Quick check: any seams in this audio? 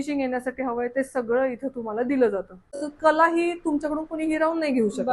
yes; 1 cut; at 2.9 s

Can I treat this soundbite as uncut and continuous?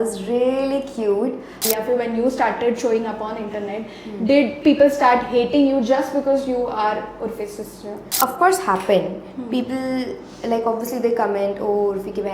no; 2 cuts; at 1.5 s, 8.0 s

